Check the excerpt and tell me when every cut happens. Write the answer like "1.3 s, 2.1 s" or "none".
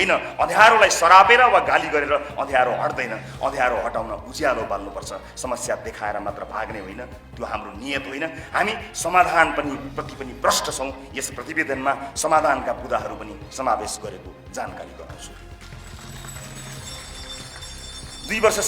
none